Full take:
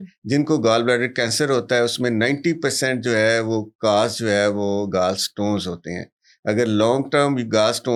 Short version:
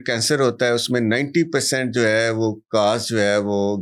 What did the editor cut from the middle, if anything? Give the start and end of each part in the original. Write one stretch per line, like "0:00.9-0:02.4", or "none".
none